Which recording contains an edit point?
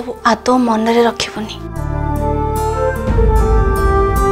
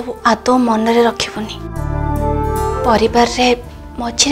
second; 1 cut; at 2.8 s

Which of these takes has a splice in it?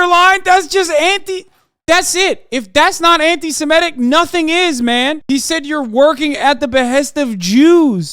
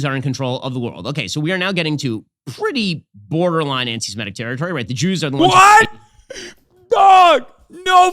first; 1 cut; at 5.2 s

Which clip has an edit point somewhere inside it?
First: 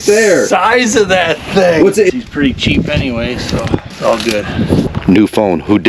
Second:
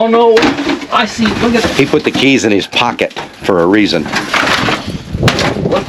first; 3 cuts; at 2.1 s, 3.9 s, 4.9 s

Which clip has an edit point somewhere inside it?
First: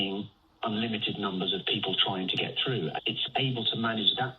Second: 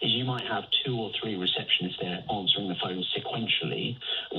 first; 1 cut; at 3.2 s

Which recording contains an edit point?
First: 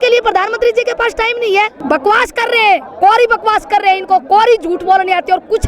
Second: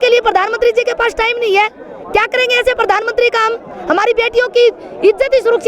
first; 1 cut; at 1.8 s

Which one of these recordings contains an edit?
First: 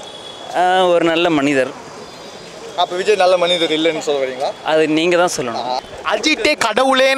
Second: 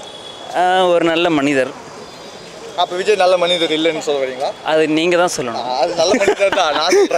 first; 1 cut; at 5.8 s

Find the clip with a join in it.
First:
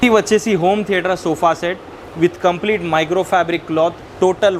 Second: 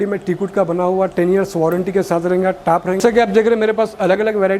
second; 1 cut; at 3.0 s

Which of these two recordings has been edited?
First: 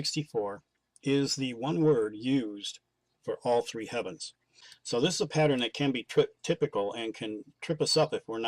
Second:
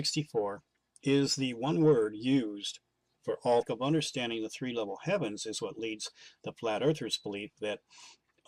first; 1 cut; at 3.7 s

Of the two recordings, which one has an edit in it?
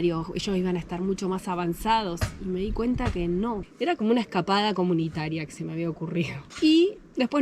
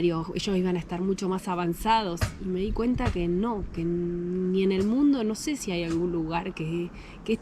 first; 1 cut; at 3.7 s

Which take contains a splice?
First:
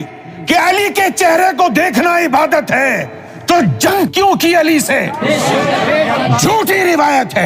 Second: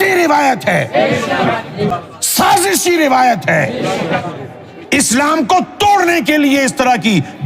second; 1 cut; at 1.9 s

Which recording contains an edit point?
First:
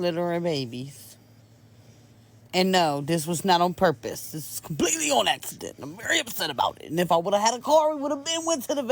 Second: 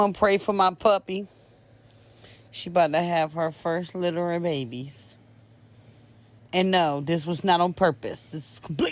second; 1 cut; at 1.2 s

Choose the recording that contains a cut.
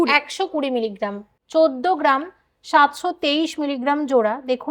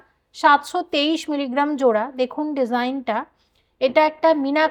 first; 1 cut; at 1.3 s

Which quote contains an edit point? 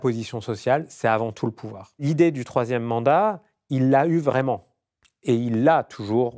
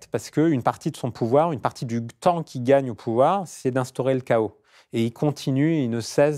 first; 1 cut; at 2.0 s

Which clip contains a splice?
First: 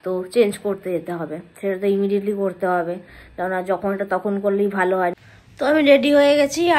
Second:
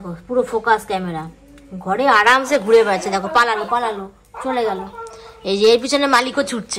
first; 1 cut; at 5.1 s

